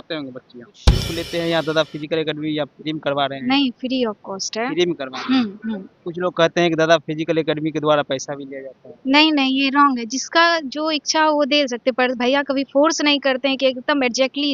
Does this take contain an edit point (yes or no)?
yes